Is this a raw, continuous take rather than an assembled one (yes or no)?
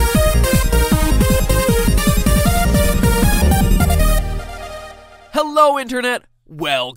no